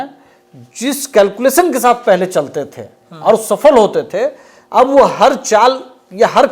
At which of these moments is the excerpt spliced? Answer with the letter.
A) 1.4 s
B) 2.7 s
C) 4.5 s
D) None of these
D